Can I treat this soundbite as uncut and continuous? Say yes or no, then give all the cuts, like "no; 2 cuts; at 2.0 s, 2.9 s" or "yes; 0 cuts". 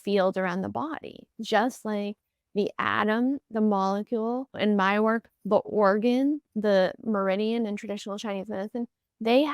no; 2 cuts; at 4.5 s, 6.5 s